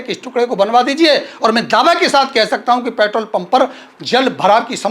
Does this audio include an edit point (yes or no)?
no